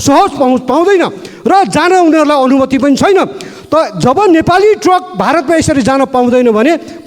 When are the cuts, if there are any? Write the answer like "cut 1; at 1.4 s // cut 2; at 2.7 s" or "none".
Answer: none